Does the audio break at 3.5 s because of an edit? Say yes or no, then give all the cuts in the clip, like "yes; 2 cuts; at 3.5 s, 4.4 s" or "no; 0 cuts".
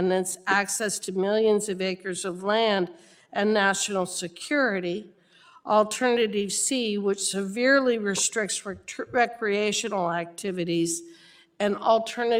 no; 0 cuts